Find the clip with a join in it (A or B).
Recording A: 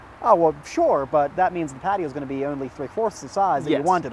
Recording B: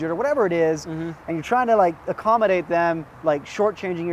B